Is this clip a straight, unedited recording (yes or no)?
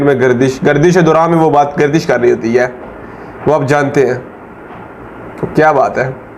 yes